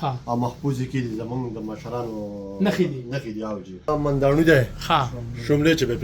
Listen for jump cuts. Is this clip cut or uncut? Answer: cut